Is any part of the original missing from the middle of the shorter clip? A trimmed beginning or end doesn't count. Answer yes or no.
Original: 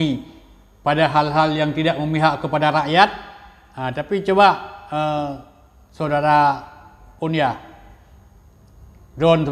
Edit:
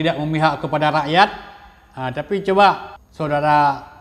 yes